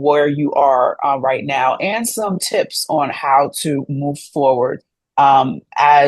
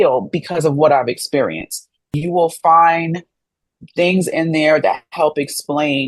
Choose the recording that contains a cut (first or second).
second